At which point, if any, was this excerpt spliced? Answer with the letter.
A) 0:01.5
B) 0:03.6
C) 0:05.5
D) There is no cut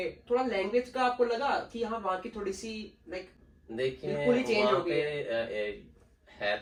D